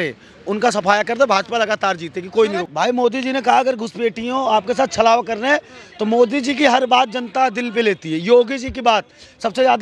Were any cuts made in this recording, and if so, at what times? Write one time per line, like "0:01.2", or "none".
0:02.6